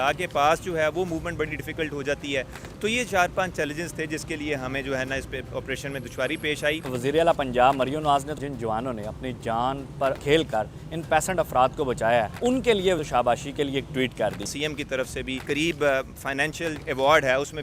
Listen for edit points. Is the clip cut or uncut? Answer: cut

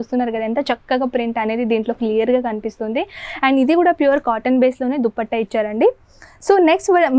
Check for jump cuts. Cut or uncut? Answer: uncut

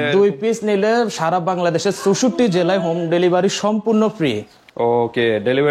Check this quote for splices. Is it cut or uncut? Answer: uncut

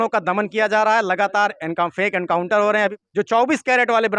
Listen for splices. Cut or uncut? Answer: cut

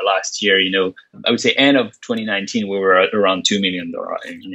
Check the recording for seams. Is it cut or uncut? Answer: cut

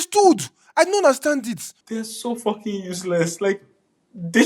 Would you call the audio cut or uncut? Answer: cut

